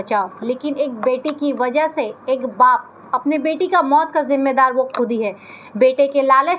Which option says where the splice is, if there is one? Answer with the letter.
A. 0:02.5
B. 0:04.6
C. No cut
C